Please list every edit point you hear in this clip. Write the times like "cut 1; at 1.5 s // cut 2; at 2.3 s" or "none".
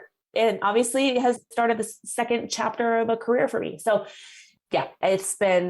cut 1; at 1.4 s // cut 2; at 4.4 s